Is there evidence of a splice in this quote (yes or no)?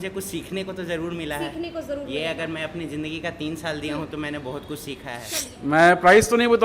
yes